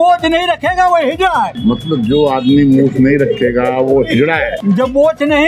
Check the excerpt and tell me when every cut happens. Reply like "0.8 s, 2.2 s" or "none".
1.5 s, 4.5 s